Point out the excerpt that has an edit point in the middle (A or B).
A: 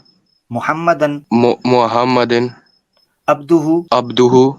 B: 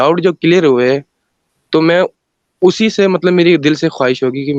A